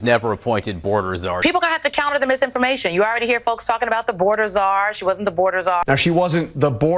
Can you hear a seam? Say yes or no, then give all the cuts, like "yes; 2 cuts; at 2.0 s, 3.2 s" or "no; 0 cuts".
no; 0 cuts